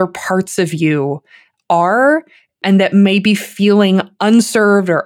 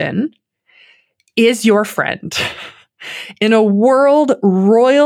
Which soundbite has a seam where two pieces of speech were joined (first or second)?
first